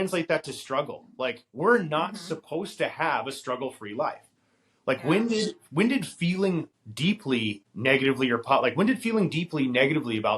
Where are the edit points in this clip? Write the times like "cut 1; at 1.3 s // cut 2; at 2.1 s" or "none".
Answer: cut 1; at 7.2 s